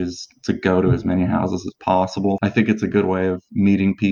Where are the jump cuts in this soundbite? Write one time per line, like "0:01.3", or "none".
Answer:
0:02.4